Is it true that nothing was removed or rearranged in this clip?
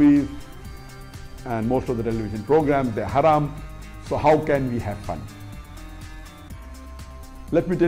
yes; 0 cuts

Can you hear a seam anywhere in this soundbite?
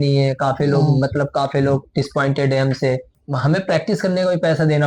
yes; 1 cut; at 3.1 s

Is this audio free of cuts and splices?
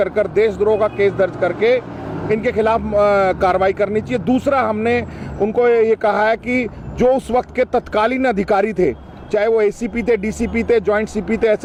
yes; 0 cuts

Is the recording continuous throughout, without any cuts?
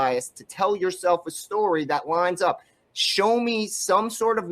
yes; 0 cuts

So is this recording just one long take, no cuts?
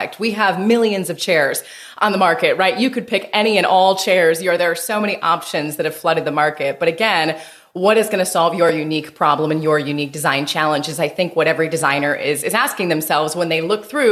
yes; 0 cuts

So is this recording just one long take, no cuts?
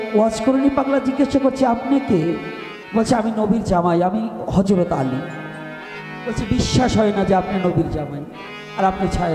yes; 0 cuts

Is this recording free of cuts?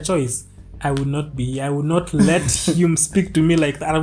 yes; 0 cuts

